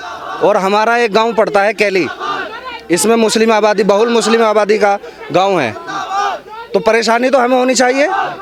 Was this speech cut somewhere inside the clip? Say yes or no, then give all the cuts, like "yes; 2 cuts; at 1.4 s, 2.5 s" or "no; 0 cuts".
no; 0 cuts